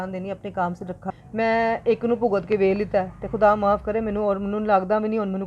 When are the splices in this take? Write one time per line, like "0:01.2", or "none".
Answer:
0:01.0